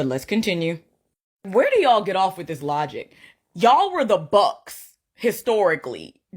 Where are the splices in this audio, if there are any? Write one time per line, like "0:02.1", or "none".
0:03.2
0:05.3